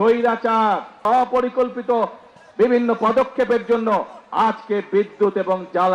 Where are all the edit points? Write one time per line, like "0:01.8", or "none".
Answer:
0:01.0